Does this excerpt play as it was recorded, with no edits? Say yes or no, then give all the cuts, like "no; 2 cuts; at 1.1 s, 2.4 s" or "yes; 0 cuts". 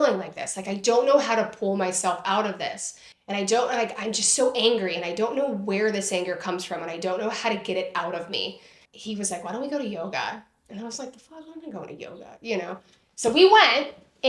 yes; 0 cuts